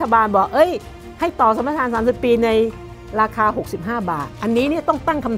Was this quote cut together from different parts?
yes; 1 cut; at 4.3 s

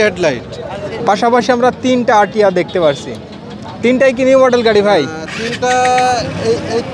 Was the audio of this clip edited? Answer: yes; 1 cut; at 1.0 s

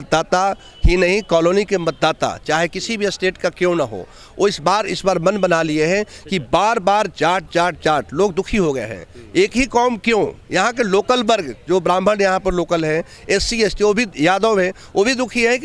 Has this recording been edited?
no; 0 cuts

